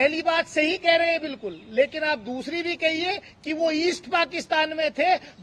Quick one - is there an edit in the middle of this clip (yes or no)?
no